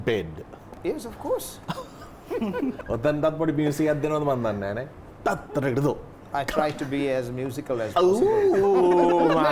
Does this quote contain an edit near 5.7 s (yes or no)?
no